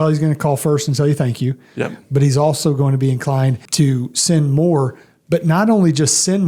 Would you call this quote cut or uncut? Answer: cut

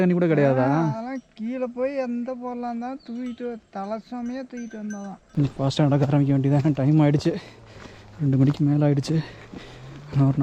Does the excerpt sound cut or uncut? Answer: cut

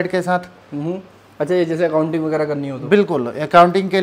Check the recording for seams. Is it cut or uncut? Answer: uncut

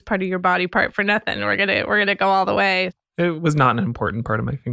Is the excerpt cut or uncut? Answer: cut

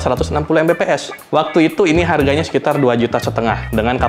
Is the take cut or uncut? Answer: uncut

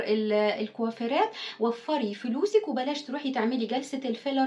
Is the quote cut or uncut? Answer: uncut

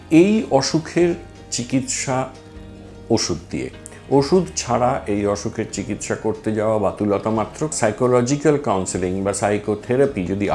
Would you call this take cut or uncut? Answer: cut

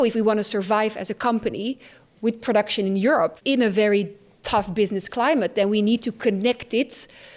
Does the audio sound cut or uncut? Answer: cut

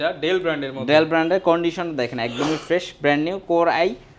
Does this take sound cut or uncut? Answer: uncut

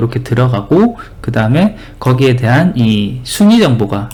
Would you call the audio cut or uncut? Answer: uncut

